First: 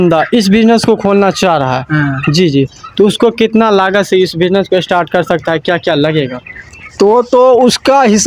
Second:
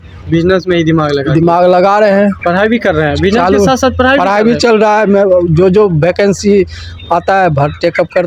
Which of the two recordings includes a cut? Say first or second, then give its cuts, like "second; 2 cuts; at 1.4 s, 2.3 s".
second; 1 cut; at 2.4 s